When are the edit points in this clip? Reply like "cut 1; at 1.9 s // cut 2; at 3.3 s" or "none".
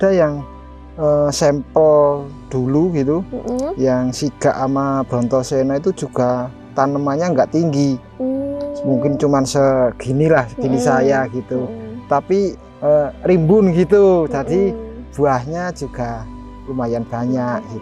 none